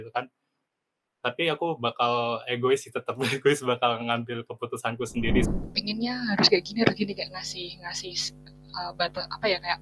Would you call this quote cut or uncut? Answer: cut